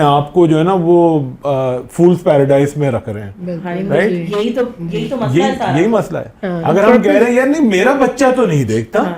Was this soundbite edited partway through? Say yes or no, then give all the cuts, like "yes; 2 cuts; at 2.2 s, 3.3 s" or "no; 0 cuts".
no; 0 cuts